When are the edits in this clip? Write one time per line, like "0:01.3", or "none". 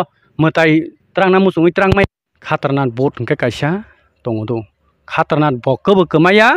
0:02.3

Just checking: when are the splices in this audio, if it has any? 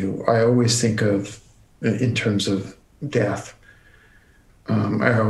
0:02.8

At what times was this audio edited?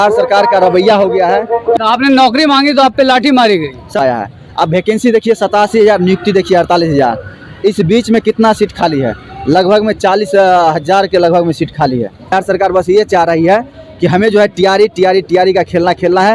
0:01.8
0:04.0
0:12.3

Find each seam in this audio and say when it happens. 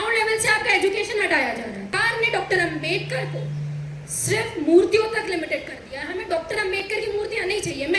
0:02.0

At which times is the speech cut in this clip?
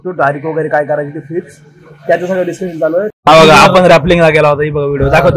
0:03.1

